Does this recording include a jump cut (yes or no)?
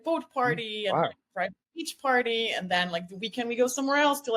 no